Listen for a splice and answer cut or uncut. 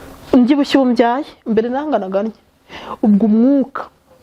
uncut